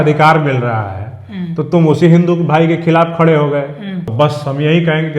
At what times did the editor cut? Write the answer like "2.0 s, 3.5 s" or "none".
4.0 s